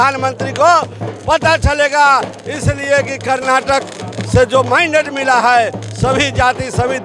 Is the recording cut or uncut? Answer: uncut